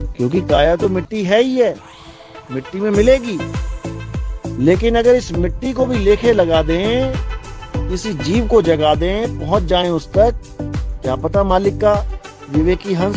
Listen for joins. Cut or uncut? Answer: uncut